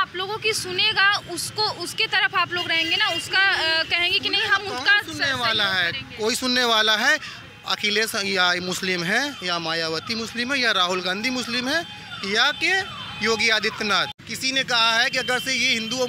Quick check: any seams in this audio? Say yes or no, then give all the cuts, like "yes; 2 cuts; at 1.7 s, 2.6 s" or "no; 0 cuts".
yes; 1 cut; at 14.2 s